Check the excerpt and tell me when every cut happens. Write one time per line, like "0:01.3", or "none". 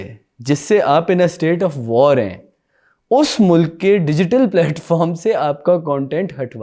none